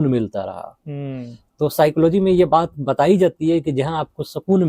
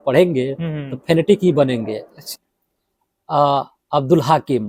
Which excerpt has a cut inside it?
second; 1 cut; at 2.3 s

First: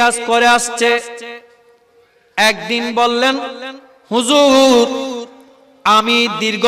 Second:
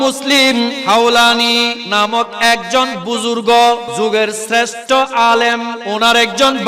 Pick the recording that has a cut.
second; 4 cuts; at 0.8 s, 1.8 s, 3.9 s, 5.8 s

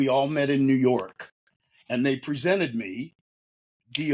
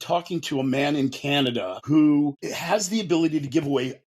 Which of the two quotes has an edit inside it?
second; 2 cuts; at 1.8 s, 2.5 s

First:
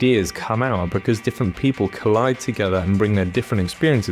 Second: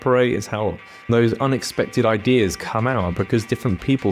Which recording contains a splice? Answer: second; 1 cut; at 1.1 s

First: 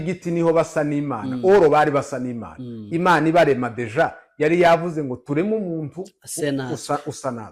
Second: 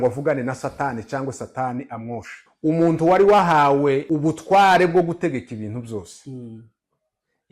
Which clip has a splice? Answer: second; 2 cuts; at 2.4 s, 4.0 s

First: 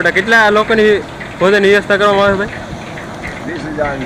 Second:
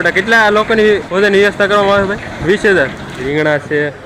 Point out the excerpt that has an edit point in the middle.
second; 3 cuts; at 1.1 s, 2.3 s, 3.3 s

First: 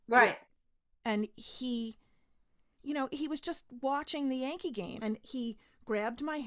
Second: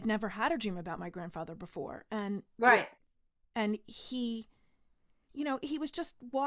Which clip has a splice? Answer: first; 1 cut; at 4.9 s

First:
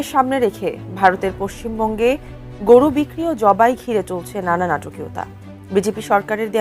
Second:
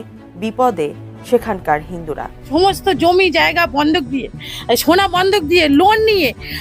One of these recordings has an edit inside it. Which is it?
second; 1 cut; at 2.3 s

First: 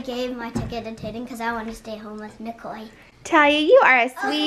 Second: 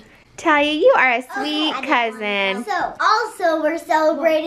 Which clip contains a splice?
second; 1 cut; at 3.0 s

